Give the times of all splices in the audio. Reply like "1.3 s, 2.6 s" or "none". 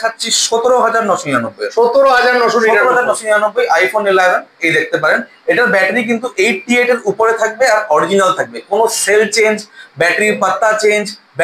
none